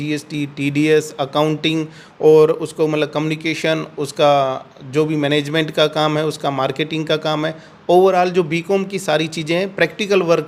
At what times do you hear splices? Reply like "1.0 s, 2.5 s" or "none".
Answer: none